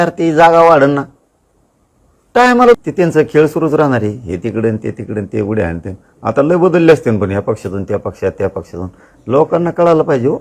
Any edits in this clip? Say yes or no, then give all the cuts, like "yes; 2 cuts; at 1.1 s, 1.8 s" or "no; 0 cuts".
yes; 1 cut; at 2.8 s